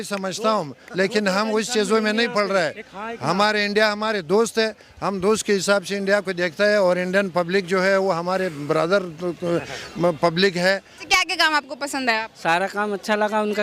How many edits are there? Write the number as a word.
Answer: one